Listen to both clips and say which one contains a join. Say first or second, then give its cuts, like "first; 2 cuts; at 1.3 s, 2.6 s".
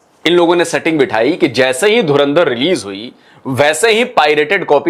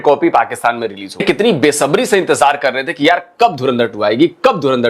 second; 1 cut; at 1.2 s